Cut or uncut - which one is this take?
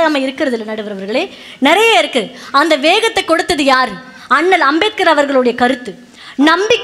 uncut